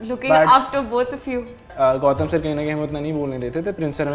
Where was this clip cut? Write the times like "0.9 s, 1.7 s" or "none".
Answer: 1.7 s